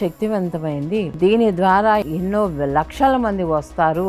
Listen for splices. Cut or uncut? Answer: cut